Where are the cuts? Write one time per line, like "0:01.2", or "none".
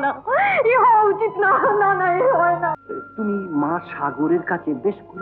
0:02.8